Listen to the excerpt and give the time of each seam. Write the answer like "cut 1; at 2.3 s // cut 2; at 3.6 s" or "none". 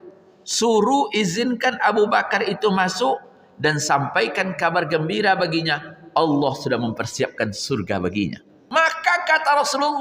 cut 1; at 8.6 s